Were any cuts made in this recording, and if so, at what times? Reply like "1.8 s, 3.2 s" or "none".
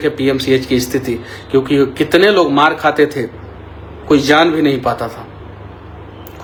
none